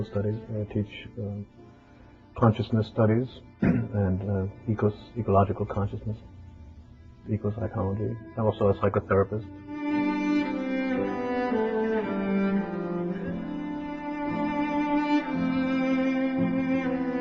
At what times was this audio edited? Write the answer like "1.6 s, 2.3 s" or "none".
5.9 s

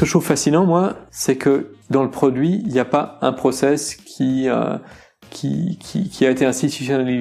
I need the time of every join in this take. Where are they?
1.1 s

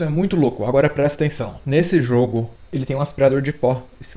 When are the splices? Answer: 2.5 s

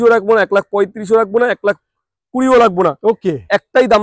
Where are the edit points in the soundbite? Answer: none

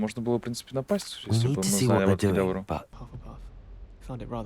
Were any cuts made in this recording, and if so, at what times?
2.9 s

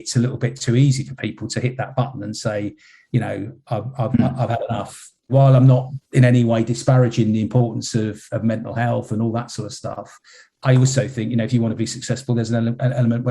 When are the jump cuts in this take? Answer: 5.3 s, 10.5 s

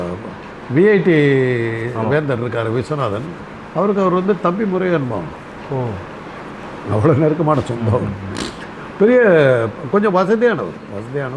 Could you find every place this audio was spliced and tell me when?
none

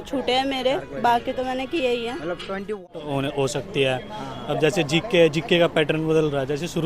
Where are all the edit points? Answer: 2.8 s

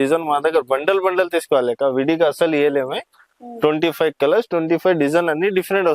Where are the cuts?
none

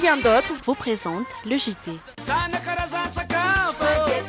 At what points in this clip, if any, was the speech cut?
2.1 s

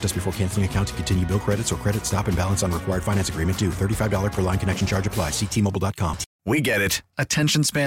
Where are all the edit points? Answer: 6.3 s

